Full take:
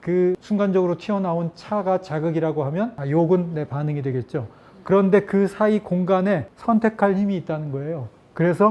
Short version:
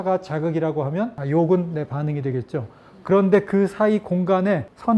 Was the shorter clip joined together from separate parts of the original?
no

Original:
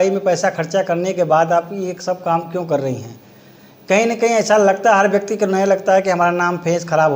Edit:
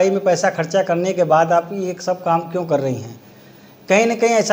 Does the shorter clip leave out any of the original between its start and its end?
no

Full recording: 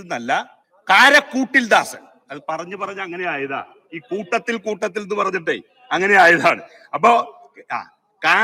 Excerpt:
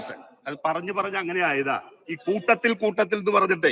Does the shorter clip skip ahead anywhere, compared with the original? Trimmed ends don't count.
no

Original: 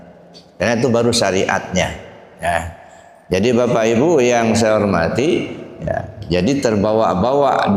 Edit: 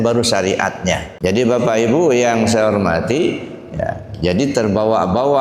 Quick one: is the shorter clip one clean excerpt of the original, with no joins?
no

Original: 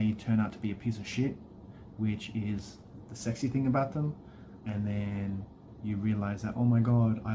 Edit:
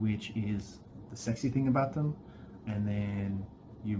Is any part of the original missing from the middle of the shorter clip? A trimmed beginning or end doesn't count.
no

